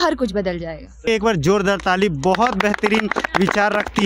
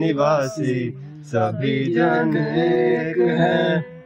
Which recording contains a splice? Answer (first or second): first